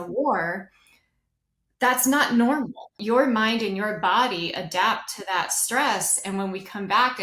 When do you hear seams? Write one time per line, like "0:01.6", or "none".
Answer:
0:03.0